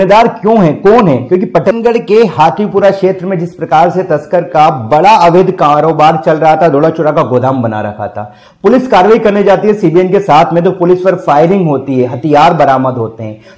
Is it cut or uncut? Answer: cut